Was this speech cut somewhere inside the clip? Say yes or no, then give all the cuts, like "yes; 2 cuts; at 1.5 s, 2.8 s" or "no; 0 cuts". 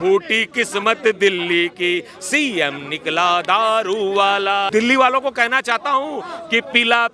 yes; 1 cut; at 4.7 s